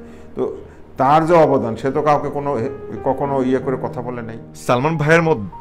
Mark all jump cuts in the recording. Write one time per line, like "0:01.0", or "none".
0:04.4